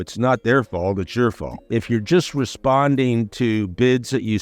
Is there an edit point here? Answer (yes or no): yes